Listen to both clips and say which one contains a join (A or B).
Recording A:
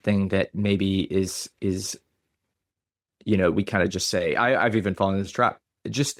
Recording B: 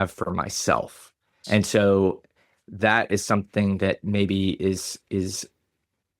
B